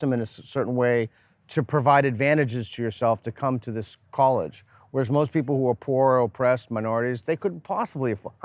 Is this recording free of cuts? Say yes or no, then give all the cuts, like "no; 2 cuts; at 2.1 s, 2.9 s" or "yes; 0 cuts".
yes; 0 cuts